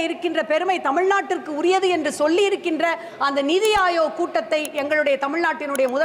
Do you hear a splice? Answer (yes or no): no